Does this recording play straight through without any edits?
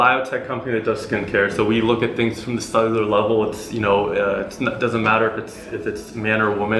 yes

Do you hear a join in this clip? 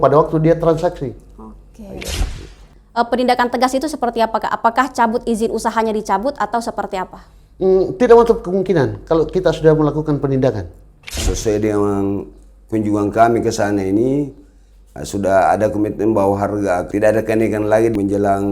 yes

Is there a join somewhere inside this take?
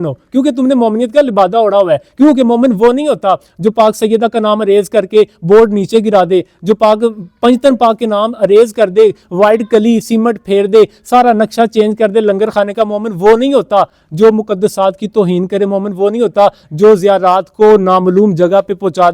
no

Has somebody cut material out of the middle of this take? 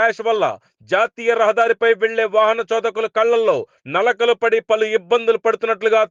no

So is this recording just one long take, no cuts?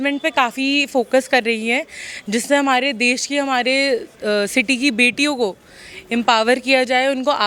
yes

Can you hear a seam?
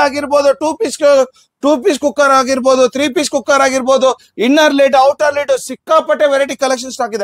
no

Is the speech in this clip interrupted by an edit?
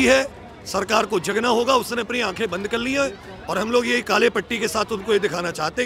no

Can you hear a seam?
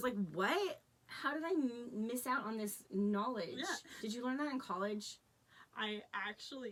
no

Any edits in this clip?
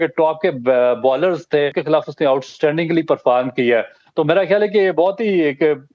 yes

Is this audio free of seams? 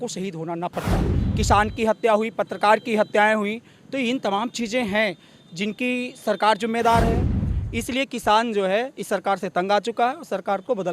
no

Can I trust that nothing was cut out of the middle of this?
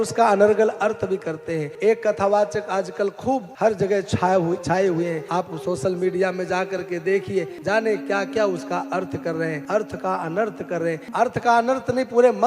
no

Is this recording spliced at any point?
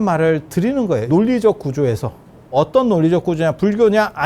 yes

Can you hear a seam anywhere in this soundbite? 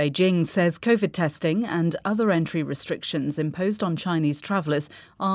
yes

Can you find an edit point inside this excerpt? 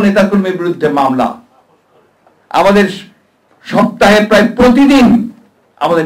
no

